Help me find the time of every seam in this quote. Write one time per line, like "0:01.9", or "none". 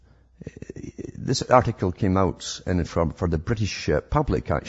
0:00.9